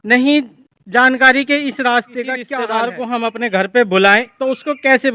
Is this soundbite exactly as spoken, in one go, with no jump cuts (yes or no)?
no